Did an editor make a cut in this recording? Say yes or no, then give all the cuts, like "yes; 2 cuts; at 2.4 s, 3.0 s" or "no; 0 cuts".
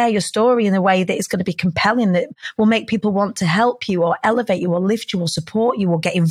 no; 0 cuts